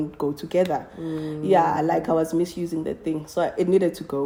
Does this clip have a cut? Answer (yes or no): no